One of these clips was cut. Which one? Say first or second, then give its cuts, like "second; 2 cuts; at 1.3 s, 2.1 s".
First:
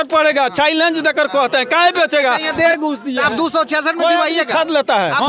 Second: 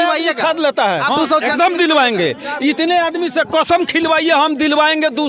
first; 1 cut; at 2.7 s